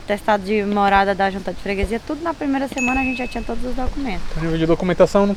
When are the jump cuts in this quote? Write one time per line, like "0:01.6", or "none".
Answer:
none